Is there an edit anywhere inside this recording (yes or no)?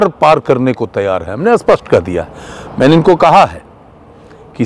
no